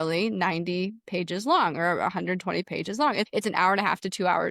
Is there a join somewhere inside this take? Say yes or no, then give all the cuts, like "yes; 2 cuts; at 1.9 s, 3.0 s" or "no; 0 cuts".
yes; 1 cut; at 3.3 s